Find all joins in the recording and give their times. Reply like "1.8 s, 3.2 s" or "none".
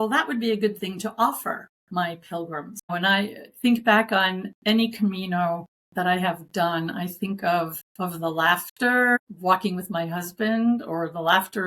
1.7 s, 2.9 s, 4.5 s, 5.8 s, 7.8 s, 9.2 s